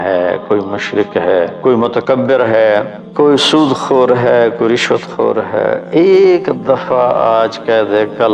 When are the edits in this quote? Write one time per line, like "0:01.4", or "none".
0:01.5
0:03.0
0:05.8